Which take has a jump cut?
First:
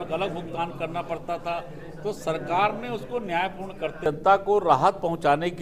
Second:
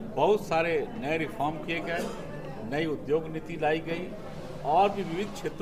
first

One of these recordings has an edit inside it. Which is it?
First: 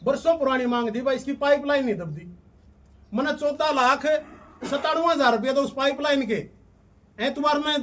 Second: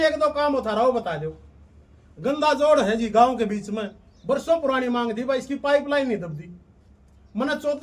first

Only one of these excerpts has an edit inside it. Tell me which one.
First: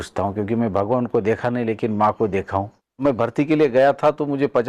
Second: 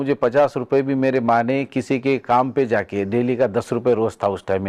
first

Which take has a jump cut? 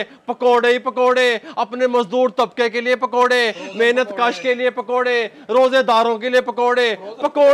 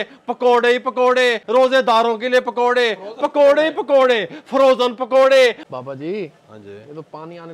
second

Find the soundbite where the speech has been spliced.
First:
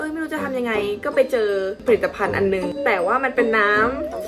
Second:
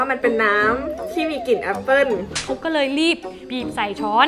second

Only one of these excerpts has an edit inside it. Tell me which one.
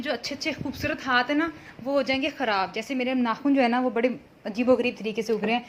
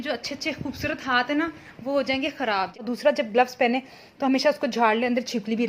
second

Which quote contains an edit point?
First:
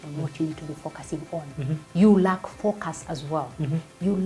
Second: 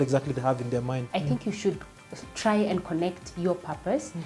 second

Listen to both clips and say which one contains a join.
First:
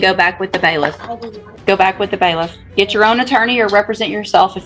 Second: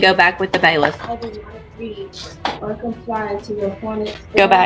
first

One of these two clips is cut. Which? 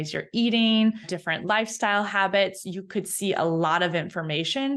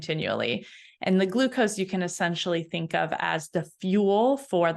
first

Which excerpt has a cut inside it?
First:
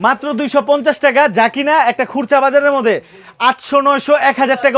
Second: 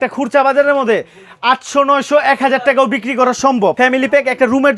second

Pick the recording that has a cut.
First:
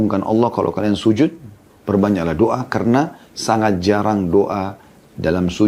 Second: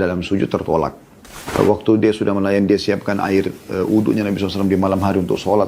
second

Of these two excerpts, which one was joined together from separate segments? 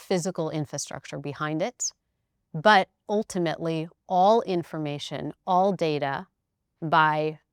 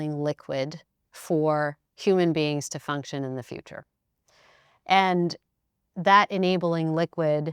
second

